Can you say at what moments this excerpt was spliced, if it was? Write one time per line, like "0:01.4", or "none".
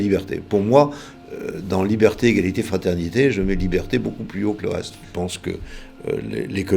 0:05.0